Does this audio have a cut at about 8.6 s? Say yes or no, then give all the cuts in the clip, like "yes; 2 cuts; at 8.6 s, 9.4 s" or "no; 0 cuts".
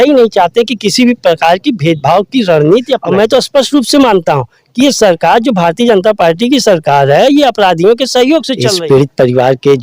yes; 2 cuts; at 3.1 s, 8.6 s